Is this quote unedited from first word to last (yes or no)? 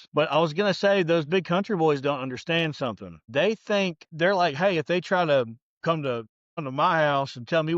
no